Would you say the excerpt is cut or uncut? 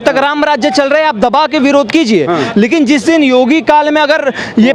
uncut